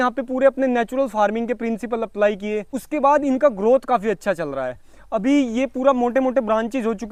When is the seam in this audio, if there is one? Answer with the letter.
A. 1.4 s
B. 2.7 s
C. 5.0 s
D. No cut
D